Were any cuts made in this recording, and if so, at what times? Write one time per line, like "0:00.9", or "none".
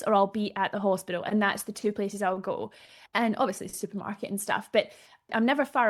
none